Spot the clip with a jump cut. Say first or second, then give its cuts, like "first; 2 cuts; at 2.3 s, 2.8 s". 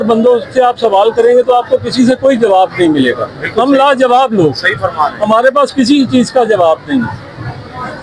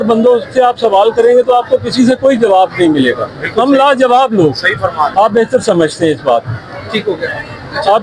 second; 1 cut; at 5.1 s